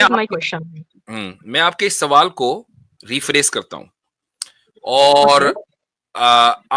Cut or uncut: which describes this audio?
uncut